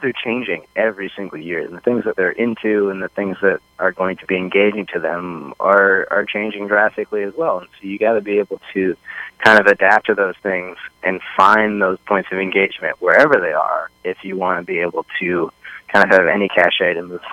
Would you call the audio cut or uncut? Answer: uncut